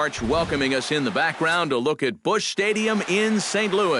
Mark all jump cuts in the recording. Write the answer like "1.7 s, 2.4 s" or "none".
none